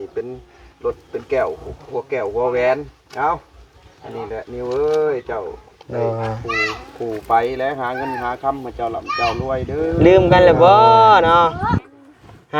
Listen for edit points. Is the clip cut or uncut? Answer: cut